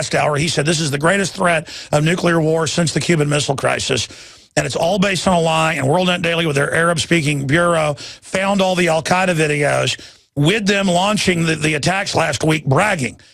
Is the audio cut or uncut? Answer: cut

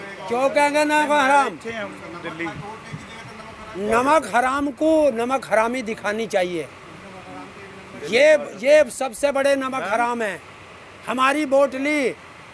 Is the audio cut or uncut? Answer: uncut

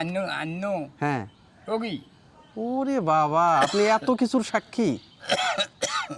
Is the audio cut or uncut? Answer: uncut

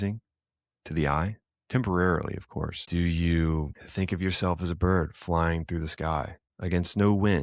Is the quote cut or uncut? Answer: cut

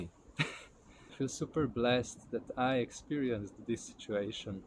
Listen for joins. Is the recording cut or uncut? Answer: cut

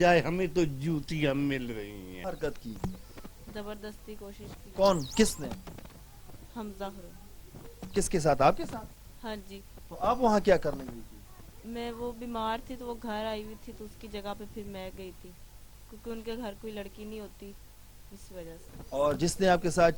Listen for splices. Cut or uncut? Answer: cut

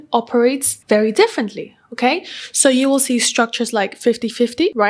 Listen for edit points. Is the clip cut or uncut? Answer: uncut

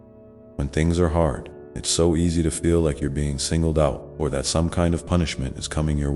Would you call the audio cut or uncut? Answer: uncut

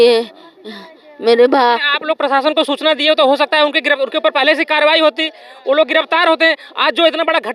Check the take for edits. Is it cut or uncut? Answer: uncut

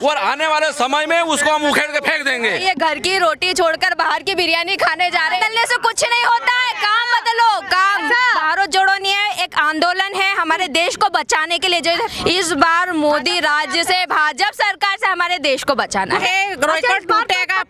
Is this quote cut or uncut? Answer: cut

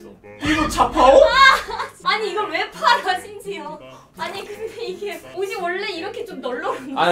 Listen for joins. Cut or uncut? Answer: cut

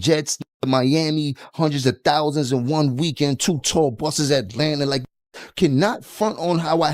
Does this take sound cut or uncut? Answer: uncut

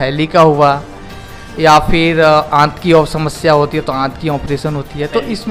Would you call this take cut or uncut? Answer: uncut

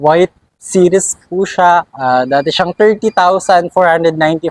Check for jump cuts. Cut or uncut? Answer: uncut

